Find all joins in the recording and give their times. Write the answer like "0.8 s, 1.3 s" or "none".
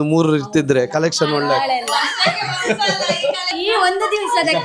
3.6 s